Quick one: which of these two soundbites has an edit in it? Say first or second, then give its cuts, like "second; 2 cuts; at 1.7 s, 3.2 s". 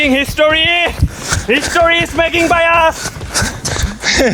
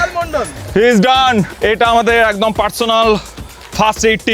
second; 1 cut; at 1.5 s